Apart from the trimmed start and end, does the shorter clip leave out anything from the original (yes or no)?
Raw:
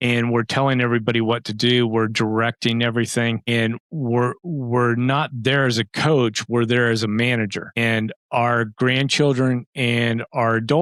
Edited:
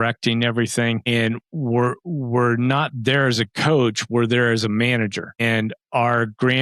no